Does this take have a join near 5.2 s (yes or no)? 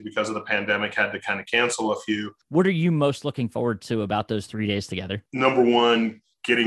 yes